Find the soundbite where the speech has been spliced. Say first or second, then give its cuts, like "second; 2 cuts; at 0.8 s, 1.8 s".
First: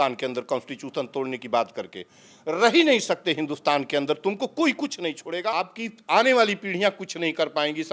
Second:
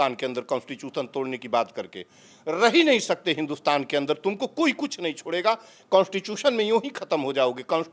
first; 1 cut; at 5.7 s